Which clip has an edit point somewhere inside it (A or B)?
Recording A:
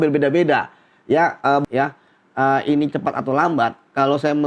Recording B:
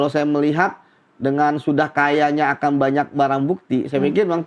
A